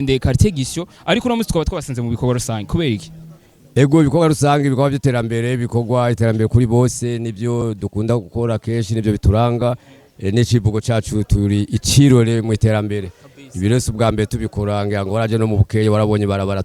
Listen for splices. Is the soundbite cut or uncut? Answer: cut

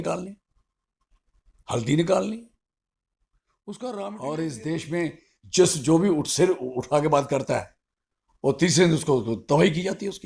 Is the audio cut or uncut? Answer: cut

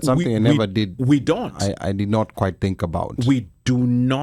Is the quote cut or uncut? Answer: uncut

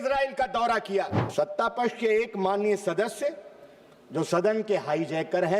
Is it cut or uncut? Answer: cut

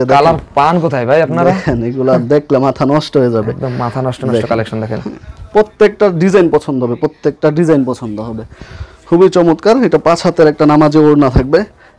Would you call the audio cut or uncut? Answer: uncut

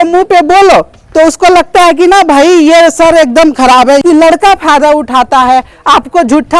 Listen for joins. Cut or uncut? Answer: cut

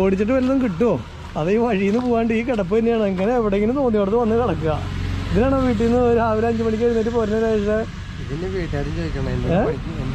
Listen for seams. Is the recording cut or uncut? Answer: uncut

